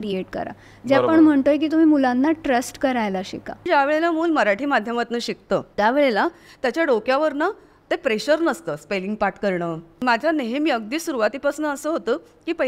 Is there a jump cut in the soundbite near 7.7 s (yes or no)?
no